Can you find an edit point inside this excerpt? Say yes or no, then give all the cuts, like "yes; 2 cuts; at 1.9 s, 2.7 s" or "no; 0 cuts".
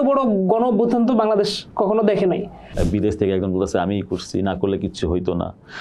yes; 1 cut; at 2.6 s